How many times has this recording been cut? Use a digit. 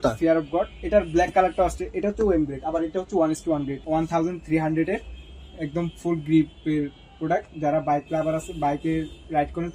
1